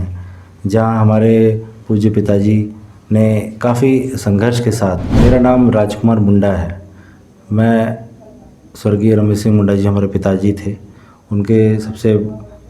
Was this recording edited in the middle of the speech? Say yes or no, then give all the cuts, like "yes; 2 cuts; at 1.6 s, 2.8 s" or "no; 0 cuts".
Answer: yes; 1 cut; at 5.1 s